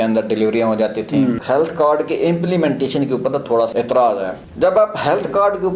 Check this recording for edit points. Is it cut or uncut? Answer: cut